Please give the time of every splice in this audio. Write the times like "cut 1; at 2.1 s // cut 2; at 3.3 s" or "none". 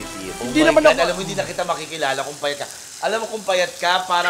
none